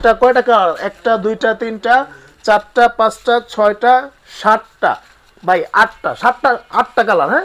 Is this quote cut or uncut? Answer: uncut